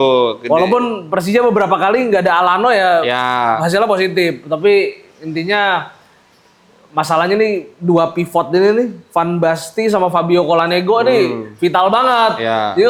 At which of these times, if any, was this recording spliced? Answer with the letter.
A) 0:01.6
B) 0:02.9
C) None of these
C